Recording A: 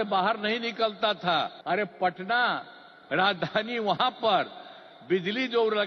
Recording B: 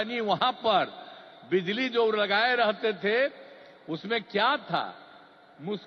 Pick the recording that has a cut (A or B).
A